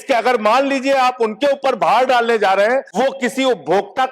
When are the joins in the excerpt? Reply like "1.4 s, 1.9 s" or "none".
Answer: 2.9 s